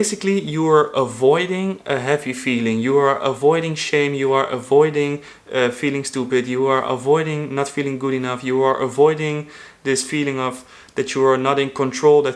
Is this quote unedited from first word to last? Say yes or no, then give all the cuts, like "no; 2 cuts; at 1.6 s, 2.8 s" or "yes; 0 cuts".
yes; 0 cuts